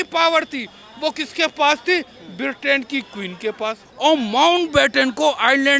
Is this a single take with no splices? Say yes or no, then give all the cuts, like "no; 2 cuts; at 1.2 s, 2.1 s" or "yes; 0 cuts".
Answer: no; 1 cut; at 3.9 s